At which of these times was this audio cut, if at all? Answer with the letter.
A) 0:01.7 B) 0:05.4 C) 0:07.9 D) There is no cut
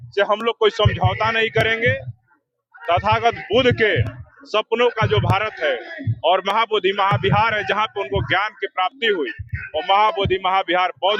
D